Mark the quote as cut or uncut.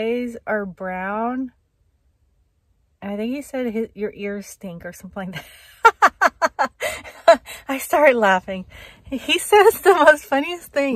uncut